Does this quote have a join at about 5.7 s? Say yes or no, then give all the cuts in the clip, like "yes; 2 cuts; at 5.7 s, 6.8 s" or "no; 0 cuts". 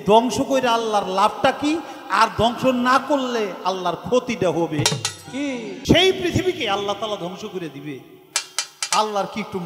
yes; 1 cut; at 5.7 s